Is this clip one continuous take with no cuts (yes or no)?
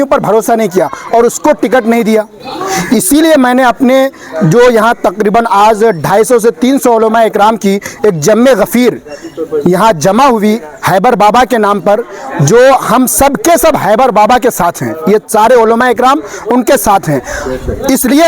yes